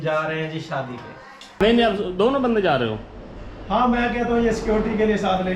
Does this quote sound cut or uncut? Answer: cut